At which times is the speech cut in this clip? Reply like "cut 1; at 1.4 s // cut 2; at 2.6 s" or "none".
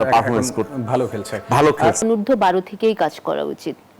cut 1; at 2.0 s